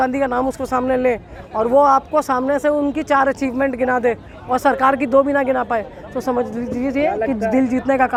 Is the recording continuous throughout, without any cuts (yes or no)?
yes